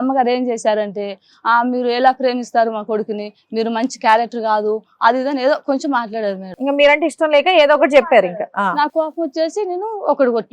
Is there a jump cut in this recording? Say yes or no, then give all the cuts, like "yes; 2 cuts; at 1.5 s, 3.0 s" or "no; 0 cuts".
no; 0 cuts